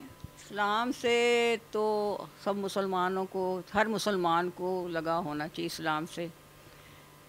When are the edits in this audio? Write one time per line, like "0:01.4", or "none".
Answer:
none